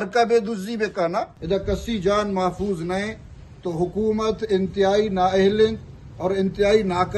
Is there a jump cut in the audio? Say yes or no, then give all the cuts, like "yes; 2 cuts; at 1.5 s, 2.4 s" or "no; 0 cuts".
yes; 1 cut; at 1.3 s